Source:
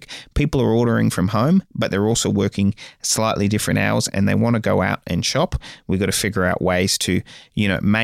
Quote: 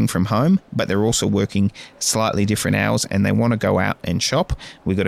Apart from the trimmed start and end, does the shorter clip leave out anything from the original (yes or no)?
no